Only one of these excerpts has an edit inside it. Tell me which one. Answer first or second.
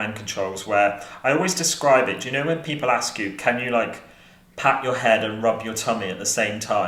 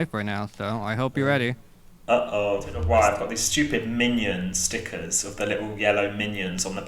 second